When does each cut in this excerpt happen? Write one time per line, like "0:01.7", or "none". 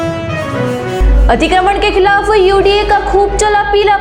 0:01.0